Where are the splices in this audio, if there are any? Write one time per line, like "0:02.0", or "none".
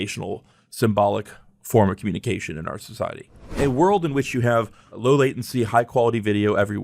0:03.6
0:05.0